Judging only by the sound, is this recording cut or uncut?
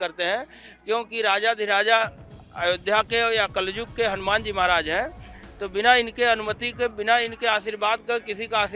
uncut